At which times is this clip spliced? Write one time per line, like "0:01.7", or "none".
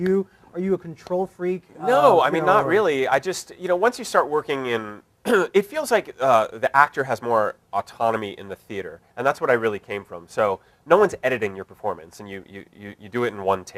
none